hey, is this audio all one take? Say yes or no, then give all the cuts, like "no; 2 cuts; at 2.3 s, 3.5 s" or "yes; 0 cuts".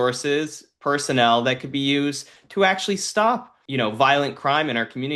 no; 1 cut; at 3.6 s